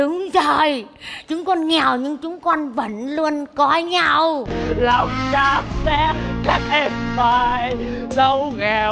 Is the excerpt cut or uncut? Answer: cut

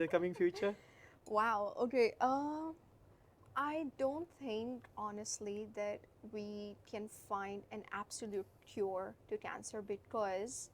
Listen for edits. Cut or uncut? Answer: uncut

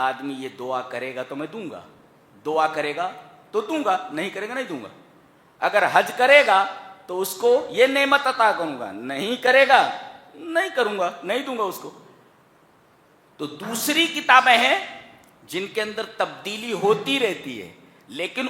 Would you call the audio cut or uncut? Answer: uncut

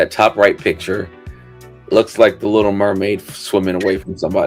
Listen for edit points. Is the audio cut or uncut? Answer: uncut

